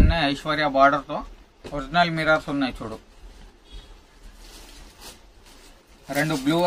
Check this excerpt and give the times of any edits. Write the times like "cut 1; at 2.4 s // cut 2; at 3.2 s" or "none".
none